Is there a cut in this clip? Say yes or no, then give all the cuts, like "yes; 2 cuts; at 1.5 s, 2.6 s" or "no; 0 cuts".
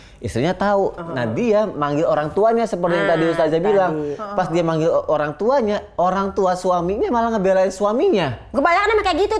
yes; 1 cut; at 1.0 s